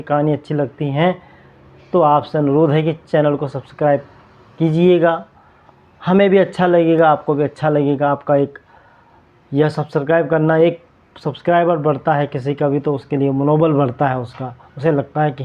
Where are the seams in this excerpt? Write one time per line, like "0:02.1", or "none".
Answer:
none